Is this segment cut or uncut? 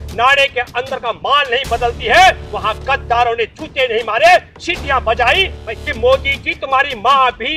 cut